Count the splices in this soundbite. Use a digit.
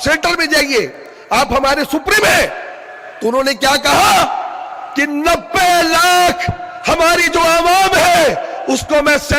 0